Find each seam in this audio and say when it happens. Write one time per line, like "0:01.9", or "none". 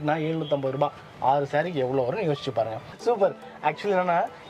0:02.9